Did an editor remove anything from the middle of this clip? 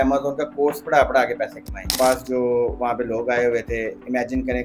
yes; 1 cut; at 1.9 s

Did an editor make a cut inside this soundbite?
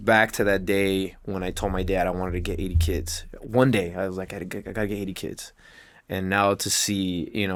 no; 0 cuts

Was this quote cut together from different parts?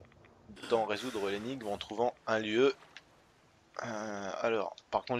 no; 0 cuts

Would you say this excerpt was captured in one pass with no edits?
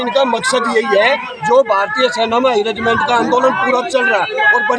yes; 0 cuts

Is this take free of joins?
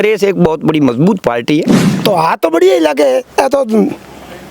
no; 1 cut; at 1.9 s

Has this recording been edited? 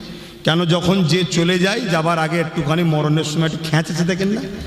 no; 0 cuts

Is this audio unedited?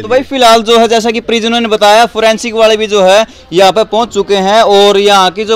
yes; 0 cuts

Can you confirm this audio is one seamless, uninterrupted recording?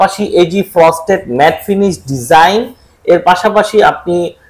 yes; 0 cuts

